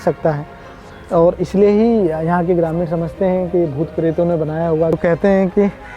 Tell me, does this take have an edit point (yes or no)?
yes